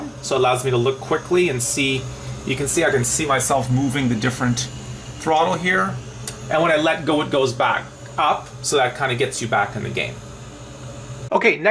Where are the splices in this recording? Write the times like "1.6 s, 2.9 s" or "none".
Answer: none